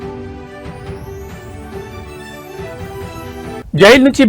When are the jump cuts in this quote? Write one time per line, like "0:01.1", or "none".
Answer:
0:02.1
0:03.0